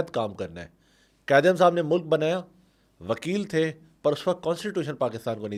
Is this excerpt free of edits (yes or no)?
yes